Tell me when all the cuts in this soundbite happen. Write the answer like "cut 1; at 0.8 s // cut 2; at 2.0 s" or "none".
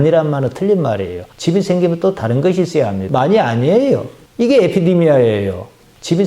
cut 1; at 3.0 s